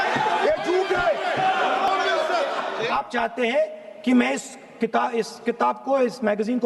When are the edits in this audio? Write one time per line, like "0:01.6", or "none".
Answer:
0:02.8